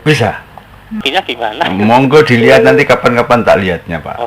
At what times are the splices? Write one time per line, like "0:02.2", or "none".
0:01.0